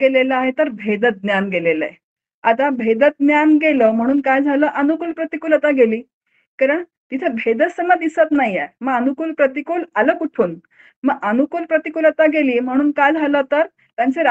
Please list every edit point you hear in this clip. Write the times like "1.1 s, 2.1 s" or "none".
none

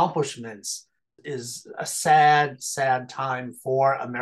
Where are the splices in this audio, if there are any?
1.2 s

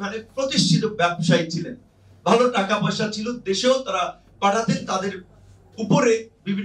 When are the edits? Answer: none

